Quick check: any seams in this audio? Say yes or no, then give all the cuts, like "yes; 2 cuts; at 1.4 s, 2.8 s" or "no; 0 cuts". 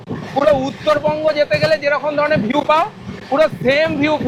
no; 0 cuts